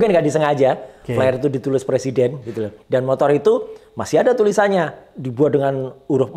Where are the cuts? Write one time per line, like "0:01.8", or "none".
0:02.8